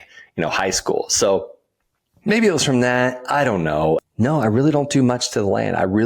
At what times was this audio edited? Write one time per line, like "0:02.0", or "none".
0:04.0